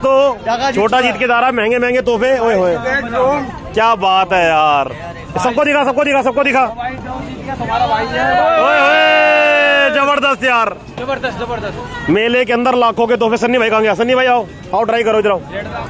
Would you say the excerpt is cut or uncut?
uncut